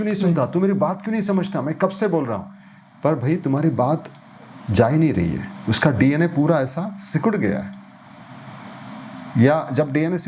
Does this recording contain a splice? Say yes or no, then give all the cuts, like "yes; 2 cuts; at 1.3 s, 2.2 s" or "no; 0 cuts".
no; 0 cuts